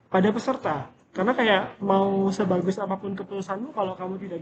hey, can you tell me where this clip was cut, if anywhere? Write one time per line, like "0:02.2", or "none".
none